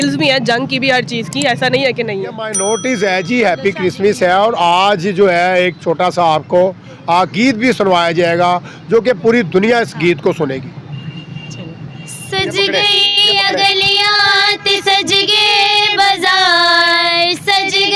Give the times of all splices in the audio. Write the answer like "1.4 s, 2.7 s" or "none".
2.4 s